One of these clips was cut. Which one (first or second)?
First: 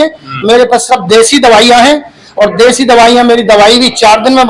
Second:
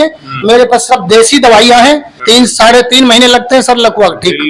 second